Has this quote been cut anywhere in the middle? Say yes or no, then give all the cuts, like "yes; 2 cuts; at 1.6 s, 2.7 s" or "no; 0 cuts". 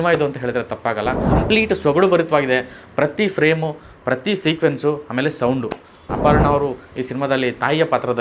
yes; 2 cuts; at 1.2 s, 6.0 s